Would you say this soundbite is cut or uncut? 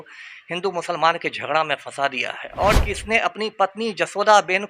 cut